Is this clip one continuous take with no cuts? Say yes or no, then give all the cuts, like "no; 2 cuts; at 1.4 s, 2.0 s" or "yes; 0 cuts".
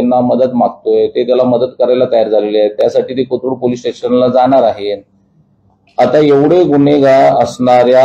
yes; 0 cuts